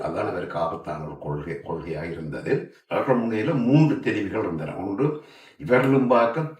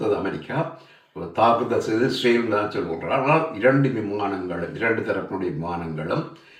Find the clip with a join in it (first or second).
first